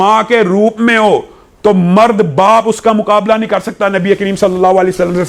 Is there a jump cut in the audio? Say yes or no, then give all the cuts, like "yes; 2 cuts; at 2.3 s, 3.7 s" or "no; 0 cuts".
no; 0 cuts